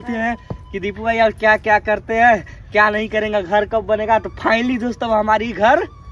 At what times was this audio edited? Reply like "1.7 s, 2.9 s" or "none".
none